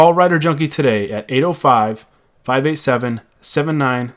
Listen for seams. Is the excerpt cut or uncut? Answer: uncut